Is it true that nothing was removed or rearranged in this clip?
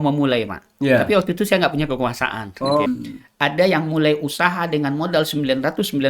no; 1 cut; at 2.9 s

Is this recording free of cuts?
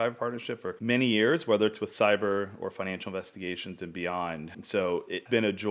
yes; 0 cuts

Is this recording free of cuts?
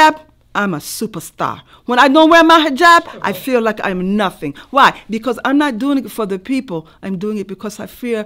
yes; 0 cuts

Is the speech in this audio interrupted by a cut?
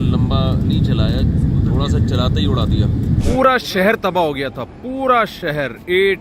yes; 1 cut; at 3.2 s

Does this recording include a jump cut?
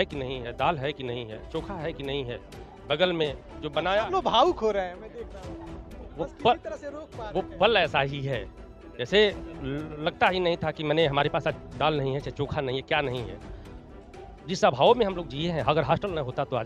no; 0 cuts

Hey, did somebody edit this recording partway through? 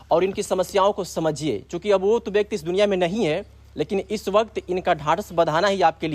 no; 0 cuts

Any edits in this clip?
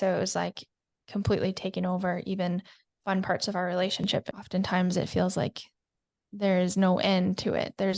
yes; 1 cut; at 4.4 s

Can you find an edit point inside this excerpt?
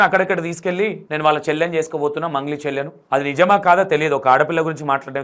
yes; 1 cut; at 1.0 s

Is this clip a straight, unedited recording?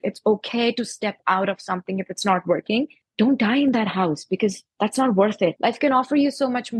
no; 2 cuts; at 3.0 s, 5.6 s

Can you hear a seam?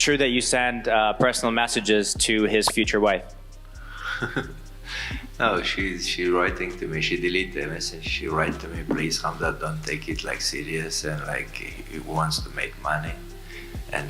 no; 0 cuts

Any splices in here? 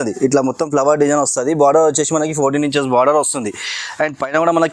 no; 0 cuts

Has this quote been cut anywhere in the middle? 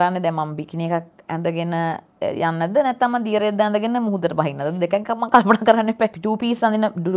yes; 1 cut; at 6.2 s

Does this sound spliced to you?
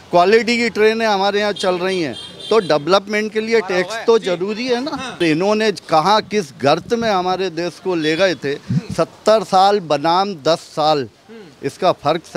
yes; 1 cut; at 5.2 s

